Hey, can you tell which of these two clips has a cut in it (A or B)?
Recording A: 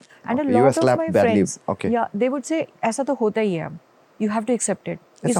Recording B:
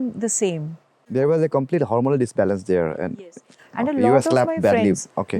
B